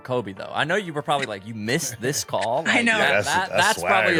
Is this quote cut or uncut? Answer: uncut